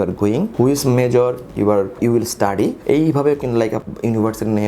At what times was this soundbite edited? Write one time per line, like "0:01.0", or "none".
0:01.9
0:03.8